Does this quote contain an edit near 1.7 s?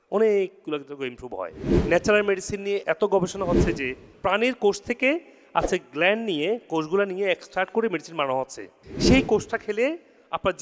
yes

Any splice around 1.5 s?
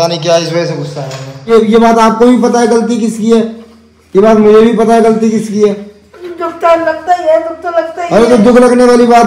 yes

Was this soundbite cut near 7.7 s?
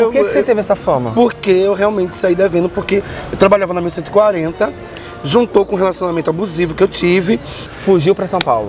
yes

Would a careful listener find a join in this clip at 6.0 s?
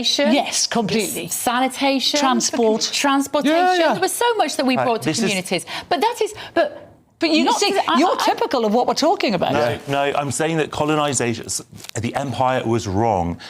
yes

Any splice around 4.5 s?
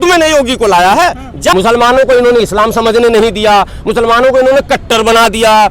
no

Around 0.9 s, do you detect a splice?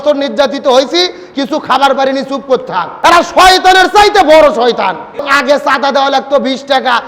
no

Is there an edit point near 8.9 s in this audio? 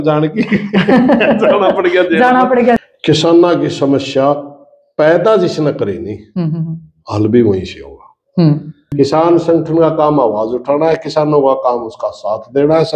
yes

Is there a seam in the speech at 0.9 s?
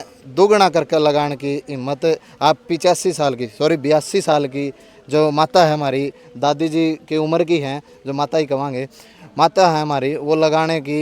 no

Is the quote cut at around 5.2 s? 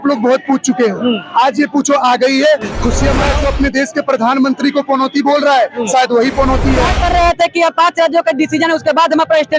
no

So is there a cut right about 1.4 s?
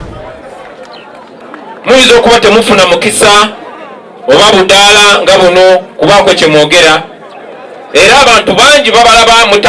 yes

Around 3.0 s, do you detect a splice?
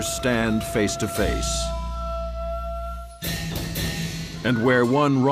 no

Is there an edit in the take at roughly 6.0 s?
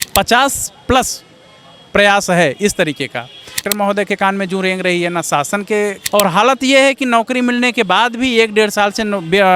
yes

